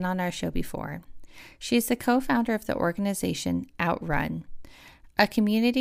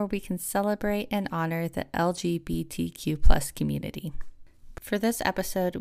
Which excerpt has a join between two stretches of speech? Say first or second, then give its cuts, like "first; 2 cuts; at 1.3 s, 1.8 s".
second; 1 cut; at 4.8 s